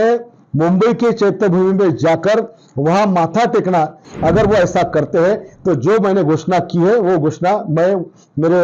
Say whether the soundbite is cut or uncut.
cut